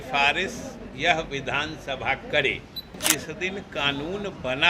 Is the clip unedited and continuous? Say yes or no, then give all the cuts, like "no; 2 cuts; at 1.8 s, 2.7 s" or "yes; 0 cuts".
no; 1 cut; at 3.0 s